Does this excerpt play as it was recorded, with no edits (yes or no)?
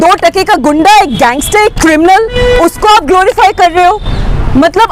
yes